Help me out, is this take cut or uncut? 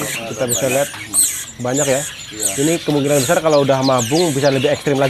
uncut